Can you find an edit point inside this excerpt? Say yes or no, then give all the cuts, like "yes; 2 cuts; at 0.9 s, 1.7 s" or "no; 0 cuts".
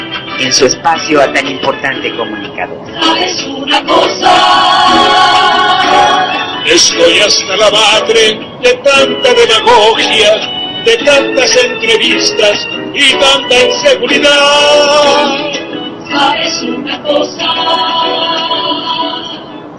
no; 0 cuts